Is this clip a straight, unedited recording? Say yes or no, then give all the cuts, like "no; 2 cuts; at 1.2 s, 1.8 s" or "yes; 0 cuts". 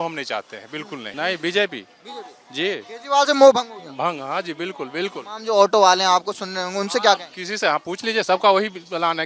no; 1 cut; at 1.0 s